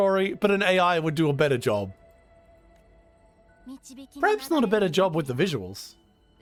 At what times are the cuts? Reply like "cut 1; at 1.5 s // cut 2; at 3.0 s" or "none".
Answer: none